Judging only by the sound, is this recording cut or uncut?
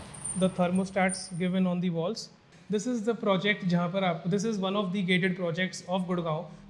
cut